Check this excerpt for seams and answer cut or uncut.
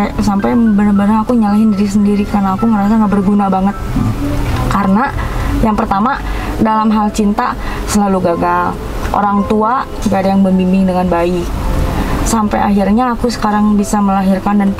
uncut